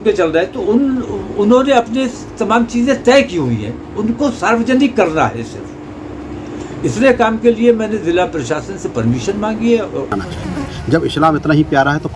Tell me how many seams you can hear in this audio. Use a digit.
1